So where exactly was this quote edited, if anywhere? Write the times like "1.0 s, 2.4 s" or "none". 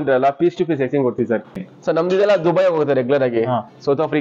1.6 s